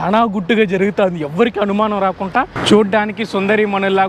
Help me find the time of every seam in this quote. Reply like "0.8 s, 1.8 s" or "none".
2.6 s